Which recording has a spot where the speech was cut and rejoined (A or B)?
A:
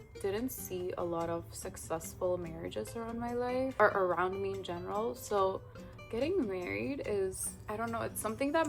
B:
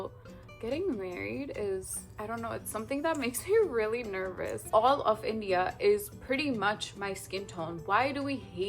B